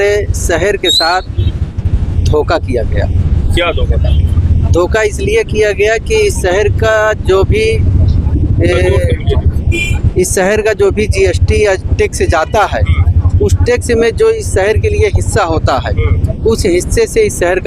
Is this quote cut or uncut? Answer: uncut